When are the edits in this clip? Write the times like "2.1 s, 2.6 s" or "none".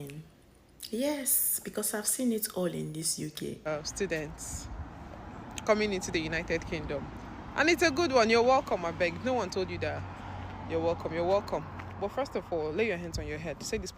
3.7 s